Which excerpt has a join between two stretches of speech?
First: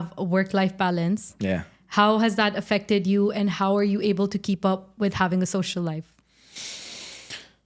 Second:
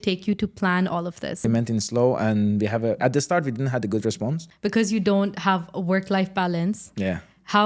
second; 2 cuts; at 1.4 s, 4.5 s

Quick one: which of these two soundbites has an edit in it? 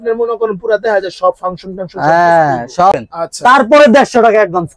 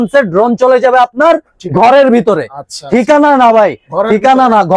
first; 1 cut; at 2.9 s

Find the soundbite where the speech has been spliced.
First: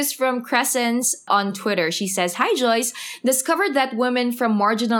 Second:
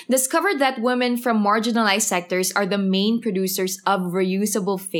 first; 1 cut; at 1.2 s

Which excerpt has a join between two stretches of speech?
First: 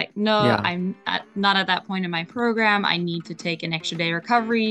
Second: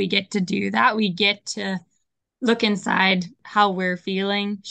second; 1 cut; at 3.4 s

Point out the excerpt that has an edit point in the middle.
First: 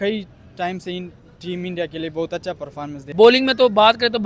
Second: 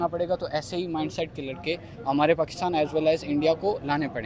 first; 1 cut; at 3.1 s

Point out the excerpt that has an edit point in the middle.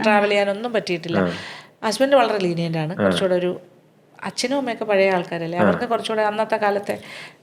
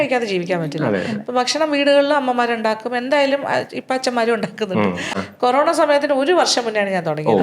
second; 1 cut; at 5.2 s

